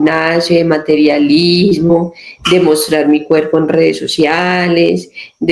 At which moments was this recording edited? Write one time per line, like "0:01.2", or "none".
none